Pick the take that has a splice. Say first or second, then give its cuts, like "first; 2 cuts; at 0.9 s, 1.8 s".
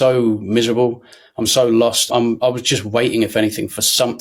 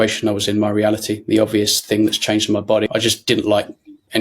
second; 1 cut; at 2.9 s